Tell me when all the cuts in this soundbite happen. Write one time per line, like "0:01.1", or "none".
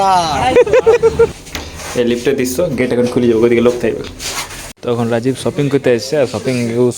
0:01.3
0:04.7